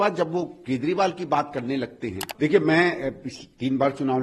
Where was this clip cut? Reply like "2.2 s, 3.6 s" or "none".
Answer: 2.3 s